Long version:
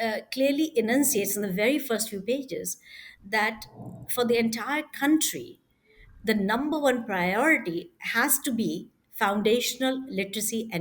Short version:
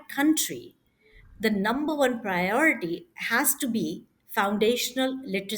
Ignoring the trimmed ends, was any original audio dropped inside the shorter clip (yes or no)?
no